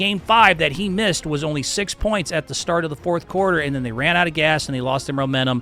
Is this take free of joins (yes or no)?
yes